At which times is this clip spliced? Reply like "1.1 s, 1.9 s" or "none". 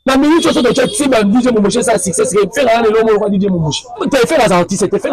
4.0 s